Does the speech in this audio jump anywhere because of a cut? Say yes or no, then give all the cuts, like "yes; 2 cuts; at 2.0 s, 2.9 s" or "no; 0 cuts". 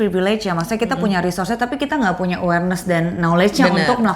no; 0 cuts